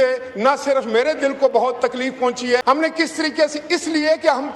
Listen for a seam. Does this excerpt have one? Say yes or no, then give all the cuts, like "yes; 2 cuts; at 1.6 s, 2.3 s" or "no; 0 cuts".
yes; 1 cut; at 2.6 s